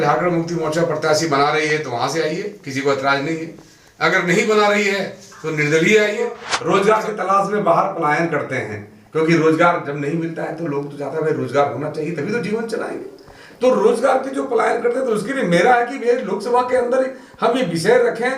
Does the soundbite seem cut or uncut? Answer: cut